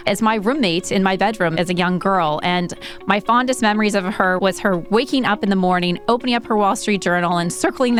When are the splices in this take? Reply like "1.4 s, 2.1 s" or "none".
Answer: none